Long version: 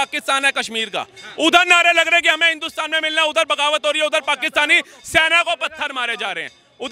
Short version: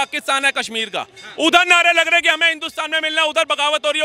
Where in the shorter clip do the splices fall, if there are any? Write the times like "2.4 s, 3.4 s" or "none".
none